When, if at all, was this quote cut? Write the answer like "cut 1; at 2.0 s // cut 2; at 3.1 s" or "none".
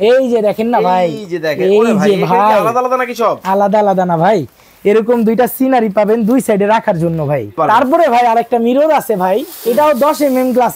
cut 1; at 7.6 s